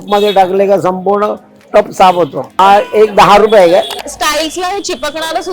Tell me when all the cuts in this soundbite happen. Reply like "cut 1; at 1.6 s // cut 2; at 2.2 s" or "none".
cut 1; at 2.6 s // cut 2; at 3.9 s